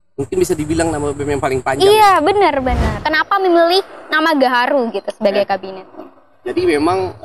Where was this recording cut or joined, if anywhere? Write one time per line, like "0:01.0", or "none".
0:03.0